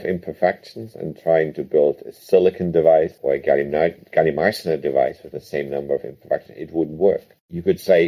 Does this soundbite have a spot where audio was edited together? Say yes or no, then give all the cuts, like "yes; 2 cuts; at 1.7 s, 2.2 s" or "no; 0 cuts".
yes; 1 cut; at 3.2 s